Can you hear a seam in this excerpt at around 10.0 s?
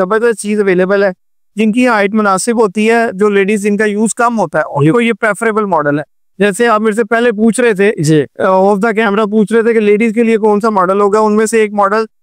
no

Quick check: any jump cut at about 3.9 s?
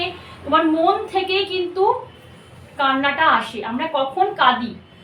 no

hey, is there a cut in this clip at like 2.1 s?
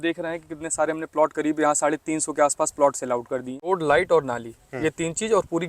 no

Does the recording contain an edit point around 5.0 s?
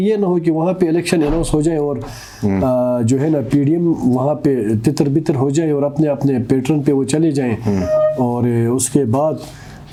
no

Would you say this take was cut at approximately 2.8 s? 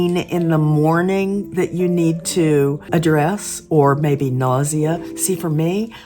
yes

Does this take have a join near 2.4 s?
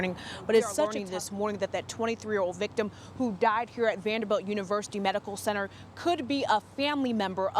no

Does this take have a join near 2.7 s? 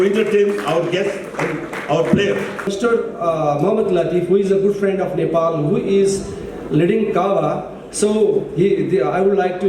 yes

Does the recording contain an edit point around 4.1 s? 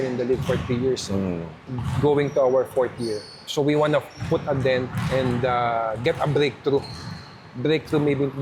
no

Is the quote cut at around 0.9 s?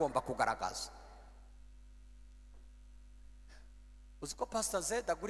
no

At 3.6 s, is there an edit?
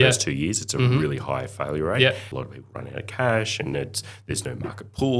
no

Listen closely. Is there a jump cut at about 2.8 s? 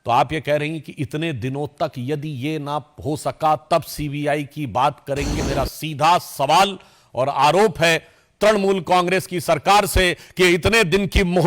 no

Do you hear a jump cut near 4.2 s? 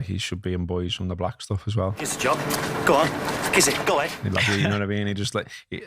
yes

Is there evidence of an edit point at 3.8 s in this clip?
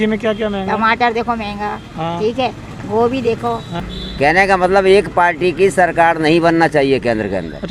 yes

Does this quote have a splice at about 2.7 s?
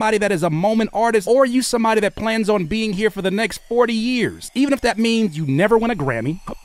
no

